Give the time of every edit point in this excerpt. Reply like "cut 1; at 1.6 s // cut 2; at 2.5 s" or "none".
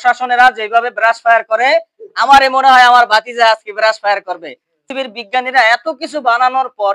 cut 1; at 4.8 s